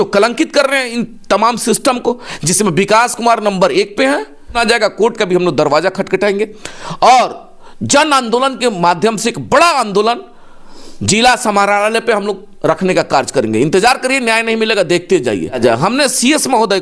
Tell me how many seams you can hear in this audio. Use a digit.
2